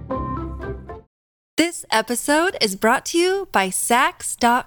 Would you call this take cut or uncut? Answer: cut